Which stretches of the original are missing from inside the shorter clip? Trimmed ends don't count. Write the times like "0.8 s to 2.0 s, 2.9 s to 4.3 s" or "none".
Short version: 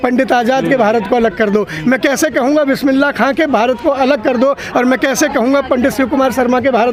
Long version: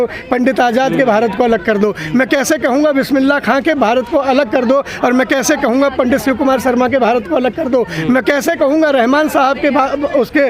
none